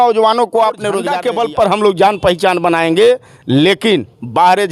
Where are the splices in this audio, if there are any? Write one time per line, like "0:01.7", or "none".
0:01.1